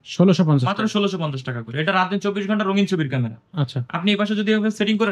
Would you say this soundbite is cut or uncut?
uncut